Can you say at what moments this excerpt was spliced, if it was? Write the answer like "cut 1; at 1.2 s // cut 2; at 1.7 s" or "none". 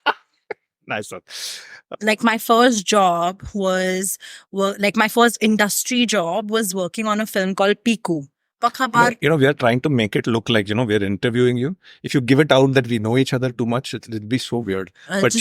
cut 1; at 1.8 s // cut 2; at 8.4 s